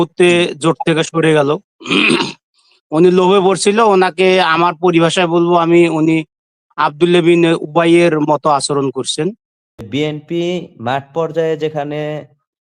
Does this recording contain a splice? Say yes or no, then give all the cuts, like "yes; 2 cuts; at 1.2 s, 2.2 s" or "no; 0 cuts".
yes; 1 cut; at 9.9 s